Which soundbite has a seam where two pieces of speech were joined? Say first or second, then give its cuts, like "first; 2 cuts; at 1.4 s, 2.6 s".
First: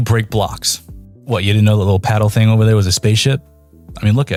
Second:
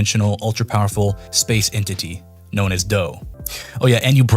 second; 1 cut; at 3.3 s